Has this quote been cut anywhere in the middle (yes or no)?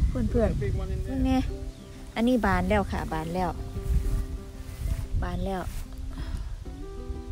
yes